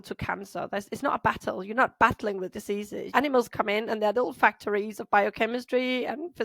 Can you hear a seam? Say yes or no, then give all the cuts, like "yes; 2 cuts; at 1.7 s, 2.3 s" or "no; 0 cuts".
yes; 1 cut; at 3.1 s